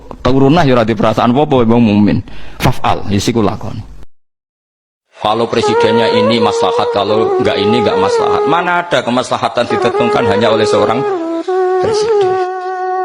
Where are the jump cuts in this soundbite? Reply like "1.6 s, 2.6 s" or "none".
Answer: 4.7 s